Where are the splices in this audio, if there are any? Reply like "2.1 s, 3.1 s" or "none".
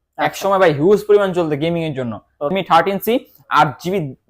2.5 s